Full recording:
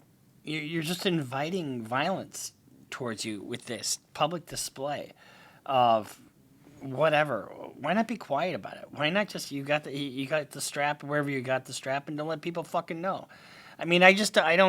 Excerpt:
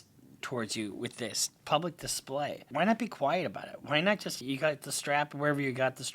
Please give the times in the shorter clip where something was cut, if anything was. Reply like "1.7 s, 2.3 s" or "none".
2.6 s, 4.4 s